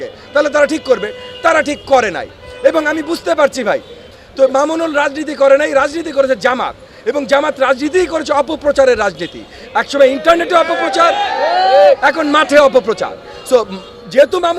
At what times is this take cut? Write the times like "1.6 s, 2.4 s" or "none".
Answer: 4.0 s